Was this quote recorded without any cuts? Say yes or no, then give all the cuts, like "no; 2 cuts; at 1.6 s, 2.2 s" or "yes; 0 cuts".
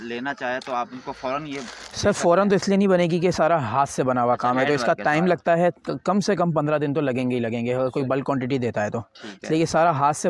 yes; 0 cuts